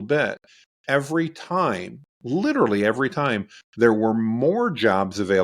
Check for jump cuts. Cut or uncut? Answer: uncut